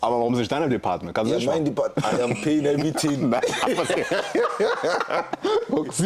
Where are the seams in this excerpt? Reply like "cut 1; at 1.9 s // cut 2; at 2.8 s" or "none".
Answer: none